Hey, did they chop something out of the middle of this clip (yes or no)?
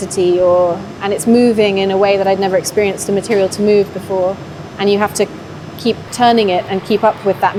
no